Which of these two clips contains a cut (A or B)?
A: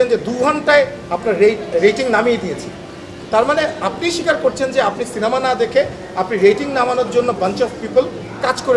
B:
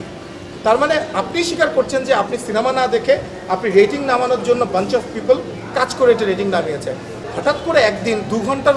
B